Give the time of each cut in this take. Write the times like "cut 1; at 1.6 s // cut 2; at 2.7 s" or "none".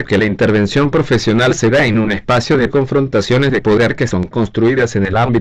cut 1; at 2.5 s